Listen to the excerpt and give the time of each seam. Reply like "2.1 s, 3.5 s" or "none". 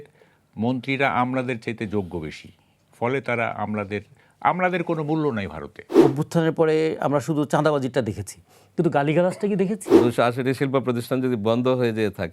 6.0 s, 10.0 s